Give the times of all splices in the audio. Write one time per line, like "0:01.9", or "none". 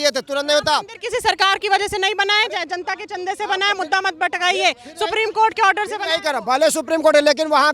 none